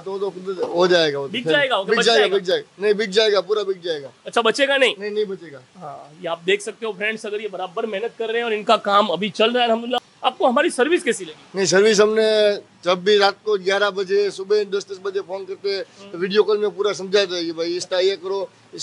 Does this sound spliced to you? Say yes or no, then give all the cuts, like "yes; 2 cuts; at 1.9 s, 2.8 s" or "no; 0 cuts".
no; 0 cuts